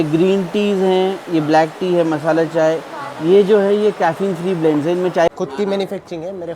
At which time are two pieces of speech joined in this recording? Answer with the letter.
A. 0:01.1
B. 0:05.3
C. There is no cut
B